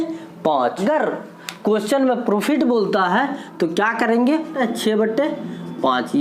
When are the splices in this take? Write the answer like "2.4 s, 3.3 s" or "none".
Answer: 0.8 s, 4.5 s